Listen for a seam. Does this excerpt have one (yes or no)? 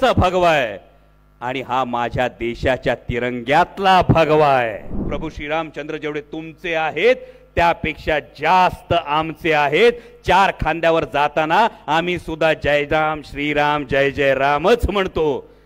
yes